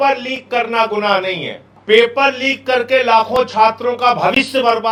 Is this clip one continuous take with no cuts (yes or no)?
yes